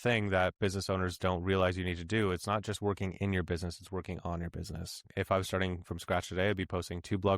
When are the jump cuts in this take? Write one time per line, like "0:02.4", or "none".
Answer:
0:05.0